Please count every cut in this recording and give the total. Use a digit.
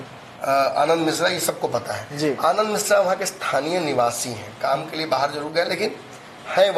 0